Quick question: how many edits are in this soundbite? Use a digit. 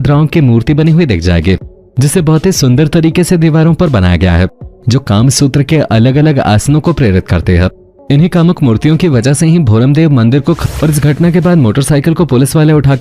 1